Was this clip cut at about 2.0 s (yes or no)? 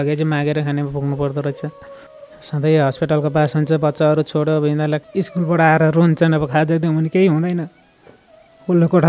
no